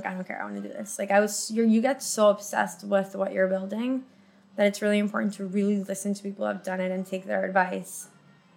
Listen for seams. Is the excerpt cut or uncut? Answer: uncut